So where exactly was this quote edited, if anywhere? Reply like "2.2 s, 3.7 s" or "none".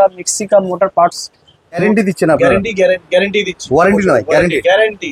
1.8 s